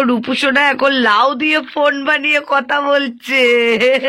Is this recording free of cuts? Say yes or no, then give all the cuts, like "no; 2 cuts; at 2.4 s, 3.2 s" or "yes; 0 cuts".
yes; 0 cuts